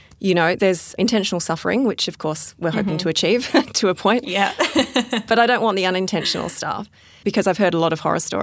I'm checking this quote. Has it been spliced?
no; 0 cuts

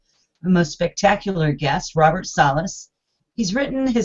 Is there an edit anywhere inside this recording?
yes; 1 cut; at 1.4 s

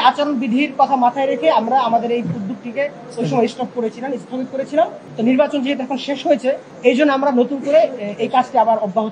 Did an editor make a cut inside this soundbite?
yes; 2 cuts; at 5.0 s, 6.7 s

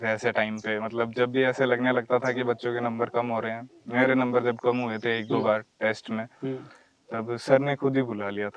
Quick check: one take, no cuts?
yes; 0 cuts

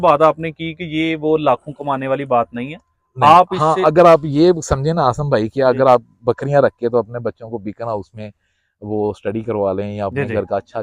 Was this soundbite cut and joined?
no; 0 cuts

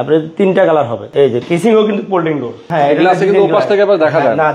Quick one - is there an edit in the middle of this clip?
yes; 2 cuts; at 1.0 s, 2.7 s

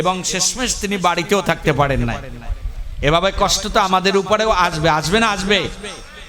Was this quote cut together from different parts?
no; 0 cuts

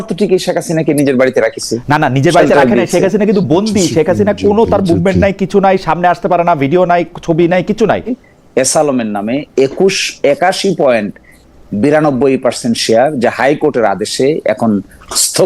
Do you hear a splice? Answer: yes; 1 cut; at 8.2 s

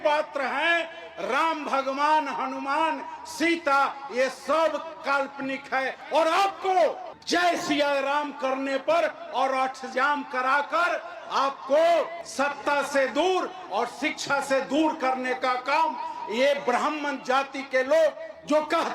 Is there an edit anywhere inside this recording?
no; 0 cuts

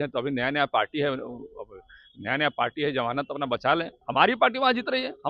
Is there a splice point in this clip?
yes; 1 cut; at 4.0 s

